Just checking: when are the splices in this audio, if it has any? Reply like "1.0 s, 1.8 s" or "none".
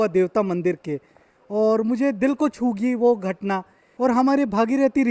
3.8 s